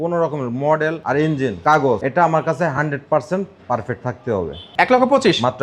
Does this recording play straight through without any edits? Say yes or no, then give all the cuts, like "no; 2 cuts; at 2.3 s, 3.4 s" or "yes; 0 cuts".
no; 1 cut; at 4.6 s